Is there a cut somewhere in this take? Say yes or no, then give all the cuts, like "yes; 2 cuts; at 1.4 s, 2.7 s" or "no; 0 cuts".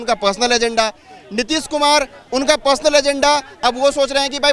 no; 0 cuts